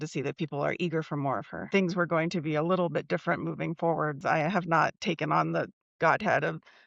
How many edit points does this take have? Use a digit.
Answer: 2